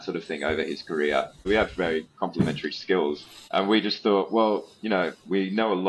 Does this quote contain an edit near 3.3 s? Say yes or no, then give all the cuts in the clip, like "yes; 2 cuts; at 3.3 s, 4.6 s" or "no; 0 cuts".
yes; 2 cuts; at 1.4 s, 3.3 s